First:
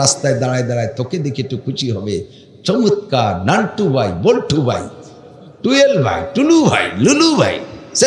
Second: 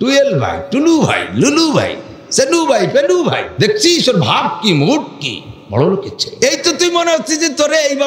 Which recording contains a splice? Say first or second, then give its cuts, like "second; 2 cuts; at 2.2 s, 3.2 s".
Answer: second; 2 cuts; at 3.5 s, 6.2 s